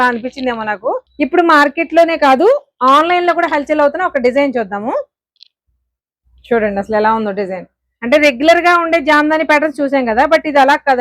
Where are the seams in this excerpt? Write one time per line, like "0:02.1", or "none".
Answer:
0:01.1